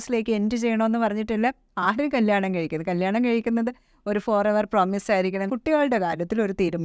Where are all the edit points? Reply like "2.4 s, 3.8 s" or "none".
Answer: 5.5 s